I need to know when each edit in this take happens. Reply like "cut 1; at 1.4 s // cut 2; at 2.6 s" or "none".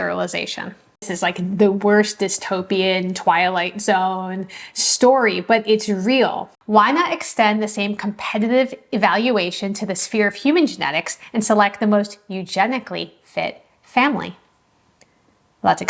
cut 1; at 1.1 s // cut 2; at 6.5 s